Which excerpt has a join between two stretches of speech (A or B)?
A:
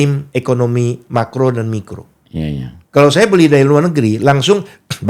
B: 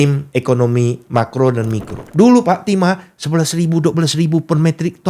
B